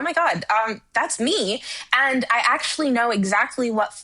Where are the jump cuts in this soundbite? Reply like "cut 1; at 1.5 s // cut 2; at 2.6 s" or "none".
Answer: none